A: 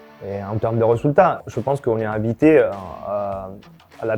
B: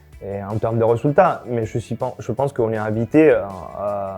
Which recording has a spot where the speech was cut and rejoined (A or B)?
A